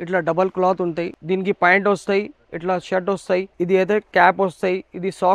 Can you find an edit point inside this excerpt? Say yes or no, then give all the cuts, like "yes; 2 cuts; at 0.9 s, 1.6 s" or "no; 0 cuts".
yes; 2 cuts; at 1.1 s, 3.5 s